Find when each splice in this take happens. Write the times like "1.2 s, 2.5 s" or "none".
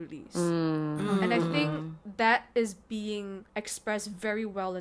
3.4 s